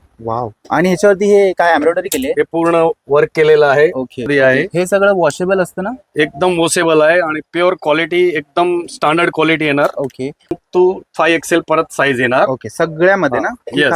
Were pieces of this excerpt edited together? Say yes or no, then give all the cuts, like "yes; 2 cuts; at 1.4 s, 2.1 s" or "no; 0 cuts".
yes; 2 cuts; at 4.3 s, 10.6 s